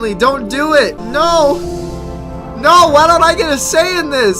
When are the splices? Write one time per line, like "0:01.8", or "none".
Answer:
0:01.0